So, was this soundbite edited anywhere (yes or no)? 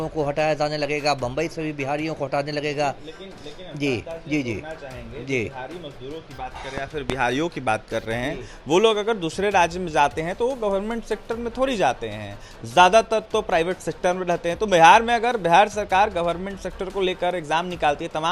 no